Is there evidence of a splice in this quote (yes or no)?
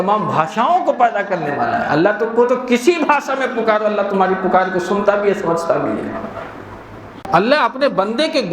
yes